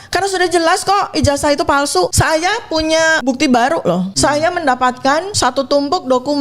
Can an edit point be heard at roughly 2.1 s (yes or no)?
yes